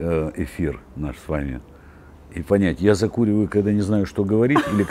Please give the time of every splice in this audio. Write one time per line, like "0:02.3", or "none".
none